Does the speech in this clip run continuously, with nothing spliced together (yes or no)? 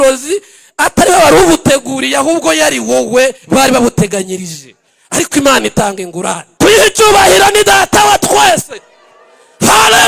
no